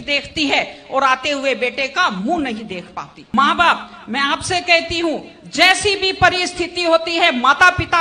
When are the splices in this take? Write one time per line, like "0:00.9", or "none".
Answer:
0:03.1